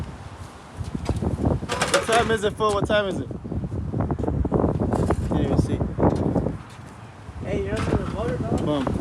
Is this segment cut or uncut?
cut